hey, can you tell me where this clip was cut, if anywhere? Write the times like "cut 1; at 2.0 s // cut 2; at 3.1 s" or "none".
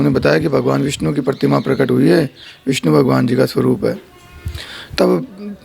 none